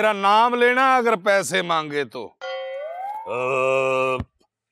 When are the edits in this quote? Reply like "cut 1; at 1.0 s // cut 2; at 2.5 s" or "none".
cut 1; at 3.2 s

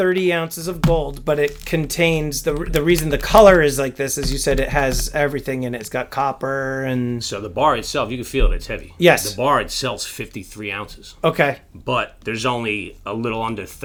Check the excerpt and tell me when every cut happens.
none

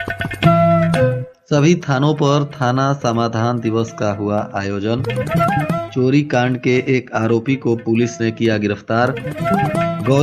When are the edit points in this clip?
cut 1; at 1.3 s

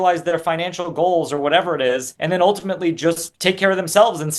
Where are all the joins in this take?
cut 1; at 2.1 s // cut 2; at 3.3 s

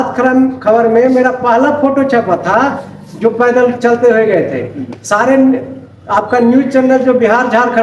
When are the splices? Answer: none

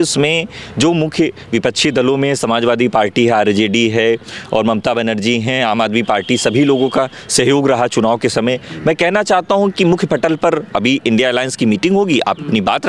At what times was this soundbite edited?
none

